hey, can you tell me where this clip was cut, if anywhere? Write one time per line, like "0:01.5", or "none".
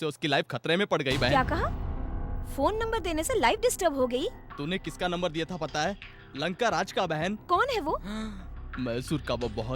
none